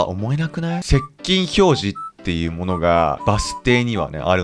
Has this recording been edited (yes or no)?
yes